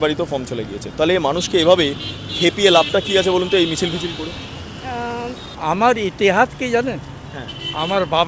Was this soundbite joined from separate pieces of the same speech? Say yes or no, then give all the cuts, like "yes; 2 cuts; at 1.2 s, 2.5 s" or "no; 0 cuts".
yes; 1 cut; at 5.5 s